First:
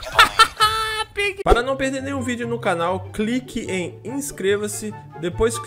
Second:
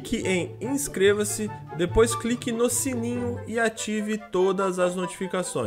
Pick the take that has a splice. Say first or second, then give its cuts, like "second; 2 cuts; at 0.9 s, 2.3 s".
first; 1 cut; at 1.4 s